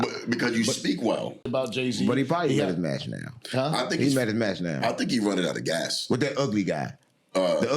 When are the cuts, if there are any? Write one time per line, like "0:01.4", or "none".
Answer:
0:01.4